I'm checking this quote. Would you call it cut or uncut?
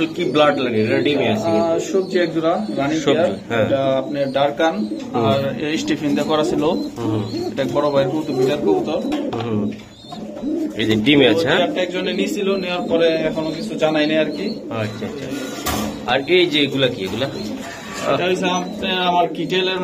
uncut